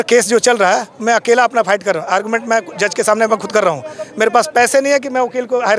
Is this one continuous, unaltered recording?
yes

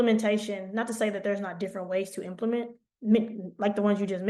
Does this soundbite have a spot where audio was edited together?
no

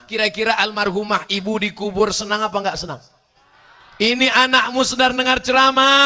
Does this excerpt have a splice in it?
no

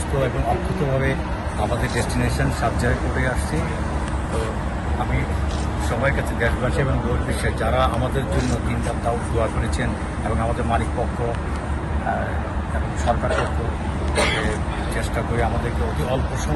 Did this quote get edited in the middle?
no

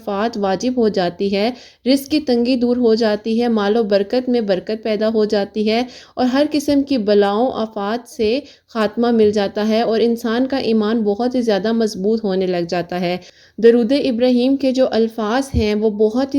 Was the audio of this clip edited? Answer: yes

